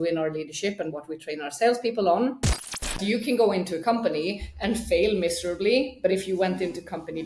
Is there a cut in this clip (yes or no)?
yes